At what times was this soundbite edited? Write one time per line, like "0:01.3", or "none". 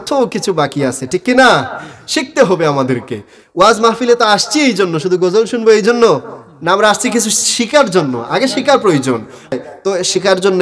0:09.5